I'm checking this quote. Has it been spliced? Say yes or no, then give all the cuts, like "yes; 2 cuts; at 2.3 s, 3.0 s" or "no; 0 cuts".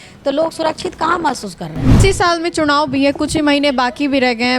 yes; 1 cut; at 2.0 s